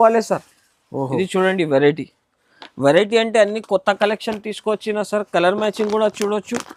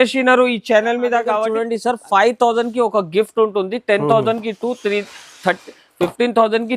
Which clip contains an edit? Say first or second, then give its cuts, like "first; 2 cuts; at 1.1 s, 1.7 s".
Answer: second; 1 cut; at 1.5 s